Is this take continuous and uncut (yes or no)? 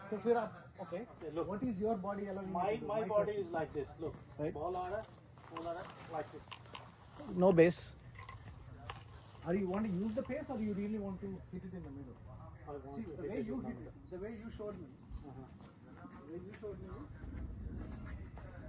no